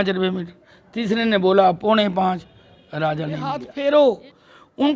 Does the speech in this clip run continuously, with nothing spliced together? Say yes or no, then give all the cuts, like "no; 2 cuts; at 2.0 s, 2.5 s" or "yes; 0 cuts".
no; 1 cut; at 3.6 s